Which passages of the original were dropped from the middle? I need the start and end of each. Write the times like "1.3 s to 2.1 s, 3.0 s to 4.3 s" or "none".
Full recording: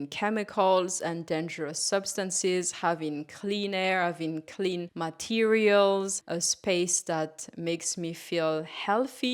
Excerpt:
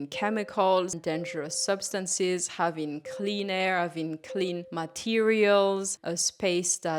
1.0 s to 1.2 s